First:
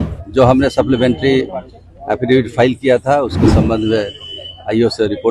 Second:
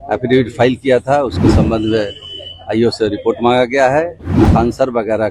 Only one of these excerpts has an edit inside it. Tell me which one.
second; 1 cut; at 4.4 s

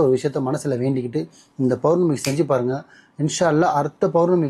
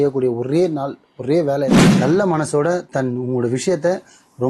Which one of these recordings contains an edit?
second; 1 cut; at 1.7 s

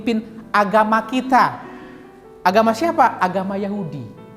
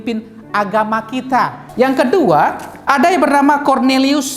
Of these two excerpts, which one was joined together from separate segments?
second; 2 cuts; at 1.6 s, 2.7 s

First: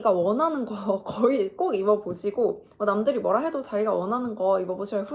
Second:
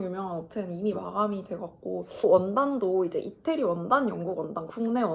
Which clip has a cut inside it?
second; 1 cut; at 2.2 s

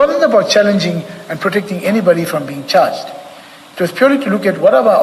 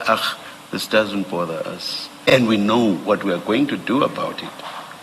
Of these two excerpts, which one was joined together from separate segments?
second; 1 cut; at 2.3 s

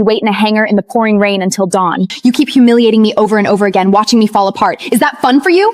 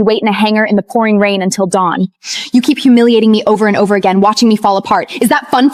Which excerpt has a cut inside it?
first; 1 cut; at 2.1 s

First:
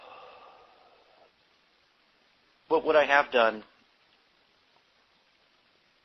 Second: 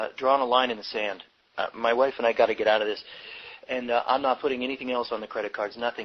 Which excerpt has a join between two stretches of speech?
first; 1 cut; at 3.0 s

